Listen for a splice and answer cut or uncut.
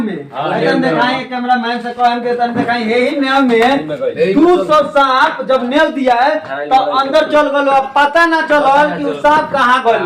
uncut